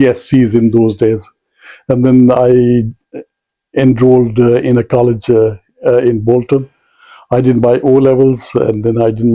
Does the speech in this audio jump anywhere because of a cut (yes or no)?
no